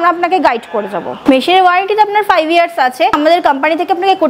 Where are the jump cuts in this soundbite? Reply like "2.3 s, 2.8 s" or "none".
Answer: 1.2 s, 3.2 s